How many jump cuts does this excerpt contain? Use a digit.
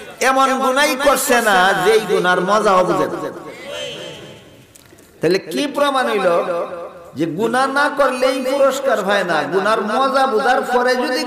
0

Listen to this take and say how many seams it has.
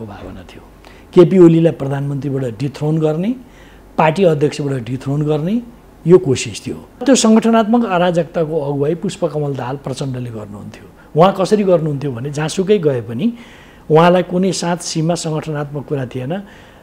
1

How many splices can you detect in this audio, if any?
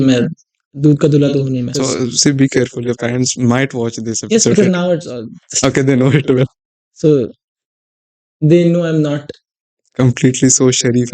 1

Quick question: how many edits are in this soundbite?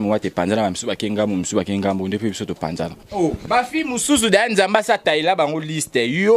1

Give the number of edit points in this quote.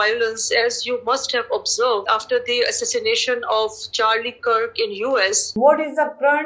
2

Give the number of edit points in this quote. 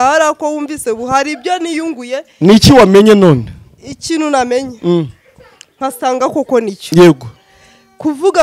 0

